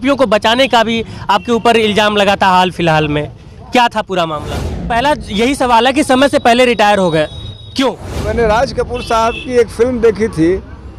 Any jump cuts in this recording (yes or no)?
yes